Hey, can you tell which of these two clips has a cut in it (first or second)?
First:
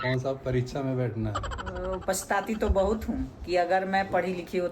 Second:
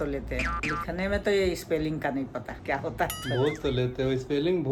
first